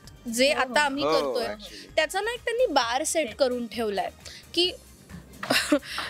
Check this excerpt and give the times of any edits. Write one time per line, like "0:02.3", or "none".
none